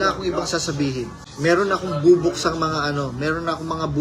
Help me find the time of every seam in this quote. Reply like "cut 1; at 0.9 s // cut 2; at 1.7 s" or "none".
cut 1; at 1.2 s